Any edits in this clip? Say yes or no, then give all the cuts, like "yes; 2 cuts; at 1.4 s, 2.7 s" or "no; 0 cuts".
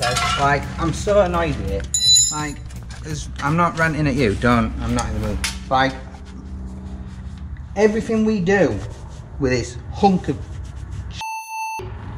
no; 0 cuts